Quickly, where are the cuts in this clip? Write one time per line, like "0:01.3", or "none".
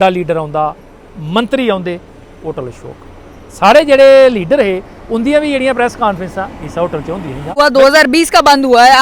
0:07.5